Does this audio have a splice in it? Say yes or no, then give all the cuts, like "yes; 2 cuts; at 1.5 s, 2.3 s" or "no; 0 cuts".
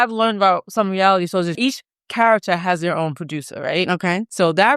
yes; 1 cut; at 1.6 s